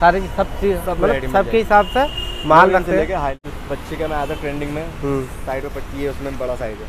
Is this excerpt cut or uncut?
cut